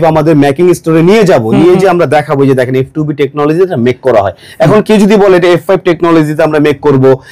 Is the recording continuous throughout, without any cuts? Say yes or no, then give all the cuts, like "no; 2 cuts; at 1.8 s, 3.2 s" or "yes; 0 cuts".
yes; 0 cuts